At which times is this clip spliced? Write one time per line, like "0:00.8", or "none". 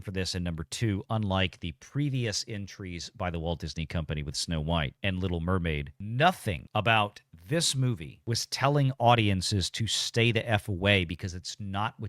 0:06.5
0:08.1